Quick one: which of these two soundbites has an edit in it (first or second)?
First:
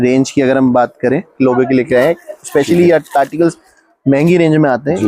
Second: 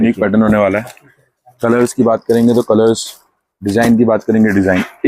first